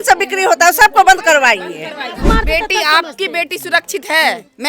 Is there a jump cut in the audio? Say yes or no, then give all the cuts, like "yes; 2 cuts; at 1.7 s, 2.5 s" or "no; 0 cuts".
yes; 1 cut; at 2.2 s